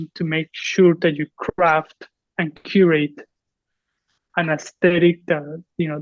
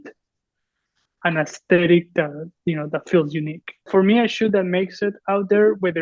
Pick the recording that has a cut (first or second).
second